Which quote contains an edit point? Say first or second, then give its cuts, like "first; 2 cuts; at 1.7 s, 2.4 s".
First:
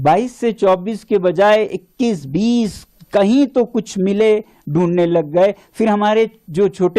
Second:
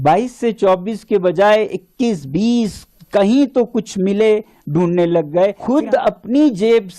second; 1 cut; at 5.6 s